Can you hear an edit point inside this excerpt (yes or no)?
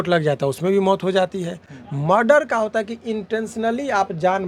no